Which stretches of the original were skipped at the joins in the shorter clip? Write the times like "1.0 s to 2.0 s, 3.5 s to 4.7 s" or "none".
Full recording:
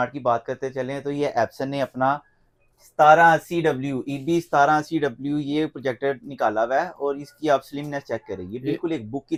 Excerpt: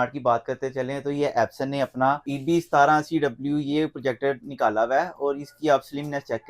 2.3 s to 4.1 s